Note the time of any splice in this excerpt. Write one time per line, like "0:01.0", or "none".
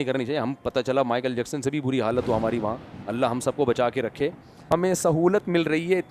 0:04.7